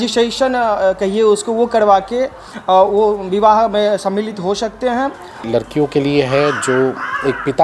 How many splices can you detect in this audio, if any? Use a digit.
1